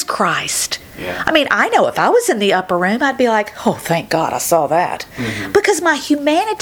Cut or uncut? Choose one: uncut